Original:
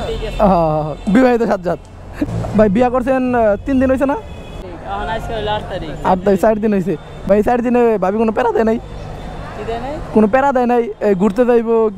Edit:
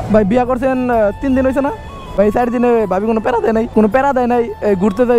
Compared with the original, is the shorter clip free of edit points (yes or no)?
no